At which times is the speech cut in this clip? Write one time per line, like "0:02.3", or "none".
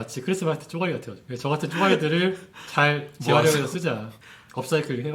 none